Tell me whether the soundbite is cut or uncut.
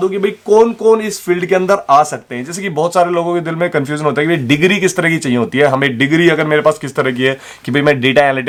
uncut